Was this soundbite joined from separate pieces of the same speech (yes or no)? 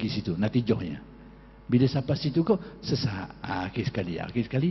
no